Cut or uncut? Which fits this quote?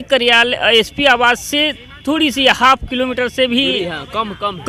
uncut